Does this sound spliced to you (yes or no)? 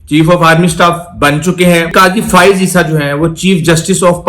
yes